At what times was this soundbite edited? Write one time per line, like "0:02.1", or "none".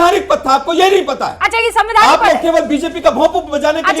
none